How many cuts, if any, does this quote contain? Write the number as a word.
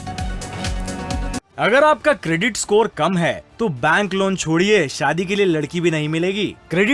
one